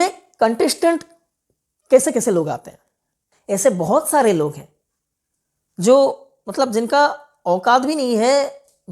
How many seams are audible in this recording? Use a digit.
1